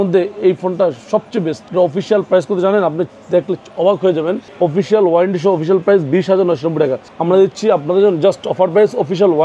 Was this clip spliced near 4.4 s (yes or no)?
yes